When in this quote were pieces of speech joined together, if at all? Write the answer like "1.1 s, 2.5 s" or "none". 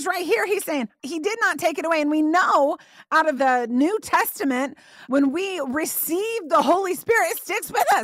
3.4 s